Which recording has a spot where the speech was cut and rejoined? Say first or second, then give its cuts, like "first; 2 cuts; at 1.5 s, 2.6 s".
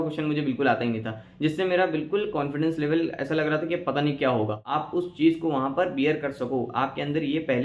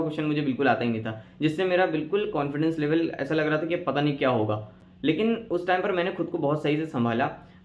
first; 1 cut; at 4.8 s